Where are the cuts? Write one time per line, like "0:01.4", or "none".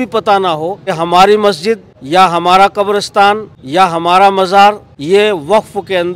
0:00.9
0:01.9
0:03.5
0:04.9